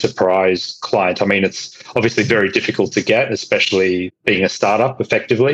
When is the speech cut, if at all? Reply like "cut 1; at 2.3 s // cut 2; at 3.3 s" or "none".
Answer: cut 1; at 4.1 s